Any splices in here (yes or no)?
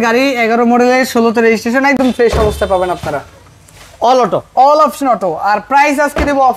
no